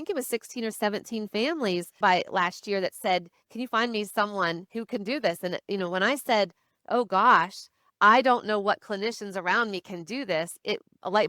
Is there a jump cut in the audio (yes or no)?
yes